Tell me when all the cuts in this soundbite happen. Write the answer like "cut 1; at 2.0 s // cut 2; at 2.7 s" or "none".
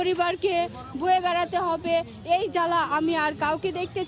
none